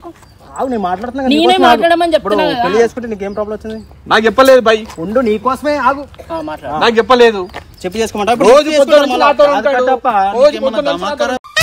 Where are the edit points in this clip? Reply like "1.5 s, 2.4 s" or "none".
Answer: none